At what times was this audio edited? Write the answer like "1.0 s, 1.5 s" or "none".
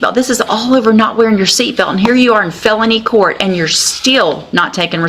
none